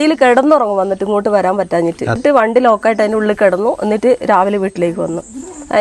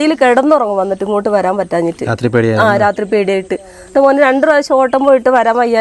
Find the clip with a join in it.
first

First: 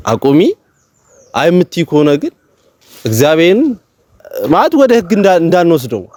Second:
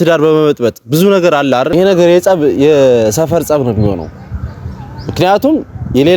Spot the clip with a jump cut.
second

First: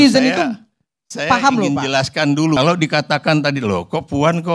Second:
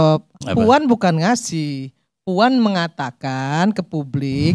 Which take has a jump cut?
first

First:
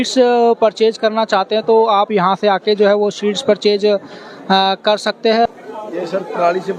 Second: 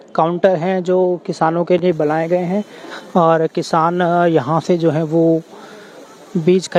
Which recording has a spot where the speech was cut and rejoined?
first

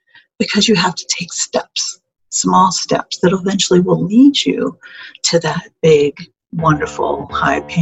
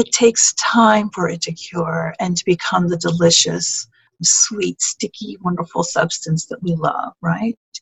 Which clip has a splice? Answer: second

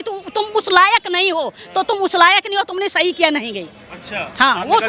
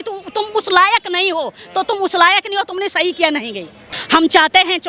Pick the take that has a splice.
second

